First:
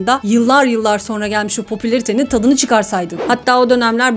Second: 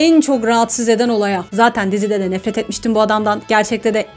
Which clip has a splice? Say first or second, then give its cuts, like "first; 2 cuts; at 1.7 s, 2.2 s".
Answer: first; 1 cut; at 3.2 s